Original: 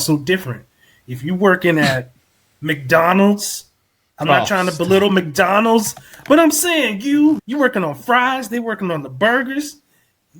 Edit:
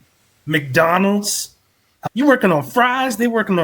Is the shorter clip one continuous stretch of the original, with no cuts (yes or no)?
no